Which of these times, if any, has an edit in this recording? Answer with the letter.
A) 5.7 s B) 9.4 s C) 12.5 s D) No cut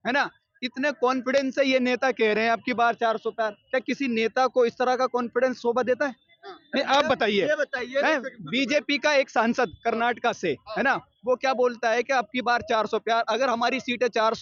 D